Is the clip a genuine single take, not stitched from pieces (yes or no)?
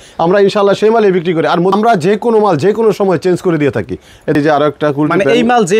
no